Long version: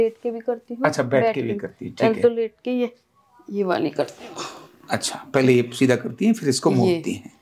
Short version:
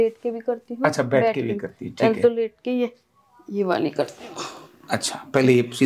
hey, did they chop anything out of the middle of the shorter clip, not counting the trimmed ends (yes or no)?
no